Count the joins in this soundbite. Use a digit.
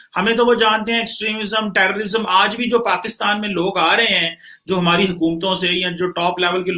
0